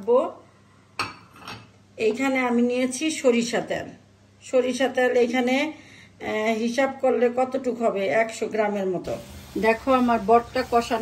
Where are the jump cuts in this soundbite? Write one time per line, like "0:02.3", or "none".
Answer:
0:09.3